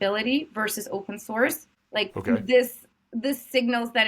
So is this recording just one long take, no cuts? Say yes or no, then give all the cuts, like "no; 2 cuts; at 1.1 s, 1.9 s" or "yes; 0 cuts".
no; 1 cut; at 1.7 s